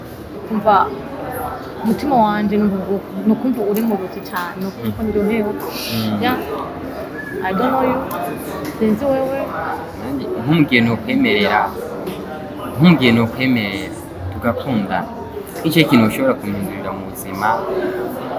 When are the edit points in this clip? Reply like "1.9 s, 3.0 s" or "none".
none